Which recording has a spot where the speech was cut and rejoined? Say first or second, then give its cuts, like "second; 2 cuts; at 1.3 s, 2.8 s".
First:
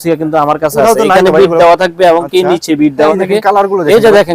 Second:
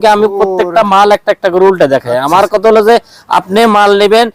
first; 1 cut; at 3.2 s